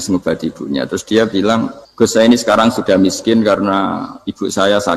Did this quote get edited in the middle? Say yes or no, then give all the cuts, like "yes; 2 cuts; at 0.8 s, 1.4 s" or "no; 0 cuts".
yes; 1 cut; at 1.8 s